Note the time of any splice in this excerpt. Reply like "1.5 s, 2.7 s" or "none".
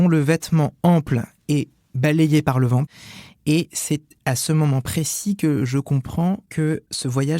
2.8 s, 4.1 s, 6.5 s